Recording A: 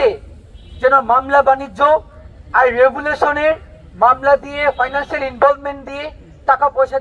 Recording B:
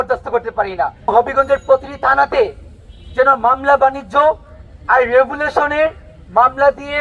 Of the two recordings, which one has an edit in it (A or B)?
B